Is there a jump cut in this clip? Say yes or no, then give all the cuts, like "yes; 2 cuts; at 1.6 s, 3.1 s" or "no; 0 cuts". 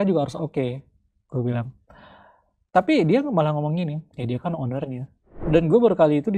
yes; 1 cut; at 5.3 s